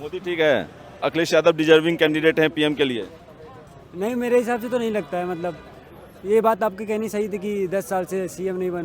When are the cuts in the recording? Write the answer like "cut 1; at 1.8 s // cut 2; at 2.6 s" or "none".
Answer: cut 1; at 1.1 s